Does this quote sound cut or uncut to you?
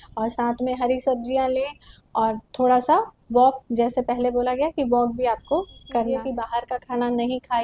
cut